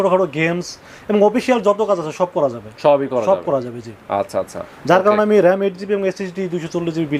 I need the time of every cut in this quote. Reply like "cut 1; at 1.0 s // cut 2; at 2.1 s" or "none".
none